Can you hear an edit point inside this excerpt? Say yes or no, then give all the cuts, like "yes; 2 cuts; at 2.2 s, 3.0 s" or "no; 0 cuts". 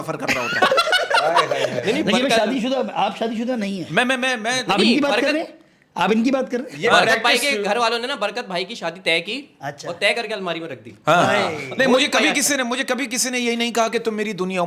no; 0 cuts